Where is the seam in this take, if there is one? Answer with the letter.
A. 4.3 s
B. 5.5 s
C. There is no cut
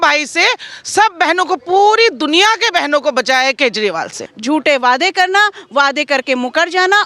A